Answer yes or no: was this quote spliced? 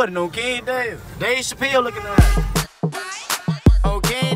no